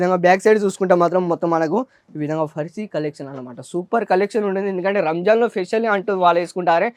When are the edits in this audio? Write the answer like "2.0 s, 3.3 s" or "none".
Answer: none

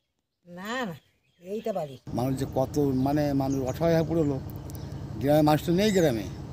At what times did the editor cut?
2.0 s

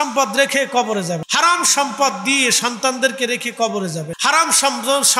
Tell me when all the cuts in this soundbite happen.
1.2 s, 4.1 s

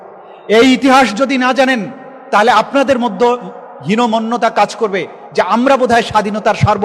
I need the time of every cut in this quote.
none

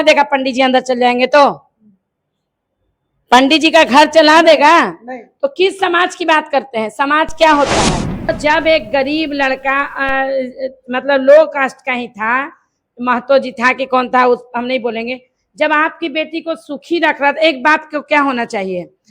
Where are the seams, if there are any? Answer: 8.3 s

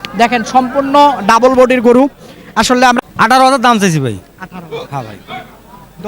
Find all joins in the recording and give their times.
2.8 s

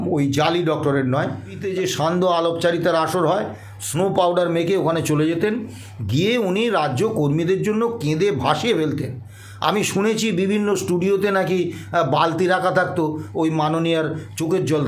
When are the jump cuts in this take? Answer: 1.6 s

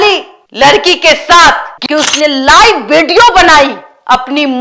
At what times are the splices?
1.7 s

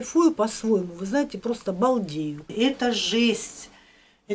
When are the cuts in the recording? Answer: 2.4 s

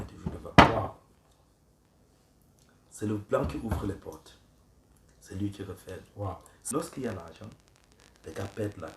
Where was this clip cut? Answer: 6.6 s

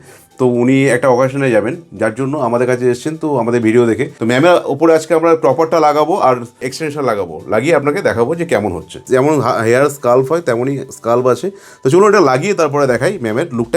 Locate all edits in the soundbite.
4.1 s, 9.0 s

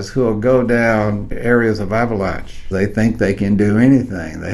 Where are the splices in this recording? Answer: 1.3 s, 2.6 s

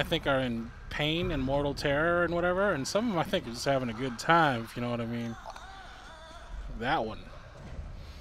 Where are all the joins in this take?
none

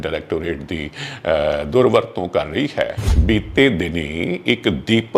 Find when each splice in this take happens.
3.1 s

